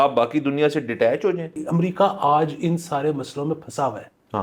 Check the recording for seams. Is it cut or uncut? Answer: cut